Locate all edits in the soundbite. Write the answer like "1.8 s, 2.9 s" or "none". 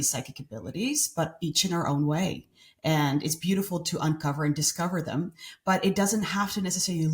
none